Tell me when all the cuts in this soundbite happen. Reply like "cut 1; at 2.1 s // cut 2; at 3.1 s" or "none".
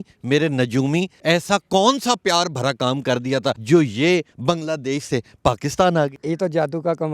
cut 1; at 1.1 s // cut 2; at 3.6 s // cut 3; at 4.3 s // cut 4; at 6.2 s